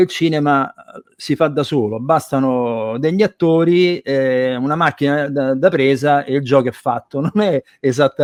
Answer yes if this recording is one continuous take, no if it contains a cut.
yes